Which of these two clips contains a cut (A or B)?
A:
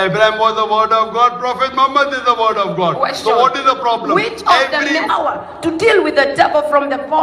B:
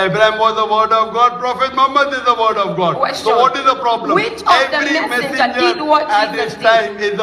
B